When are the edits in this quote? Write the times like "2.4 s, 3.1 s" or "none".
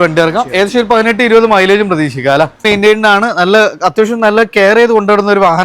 2.6 s